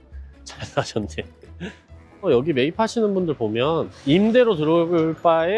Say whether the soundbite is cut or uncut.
cut